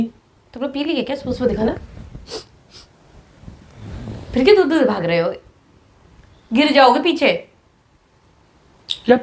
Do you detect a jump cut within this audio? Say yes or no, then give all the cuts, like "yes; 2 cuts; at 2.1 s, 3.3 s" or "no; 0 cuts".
no; 0 cuts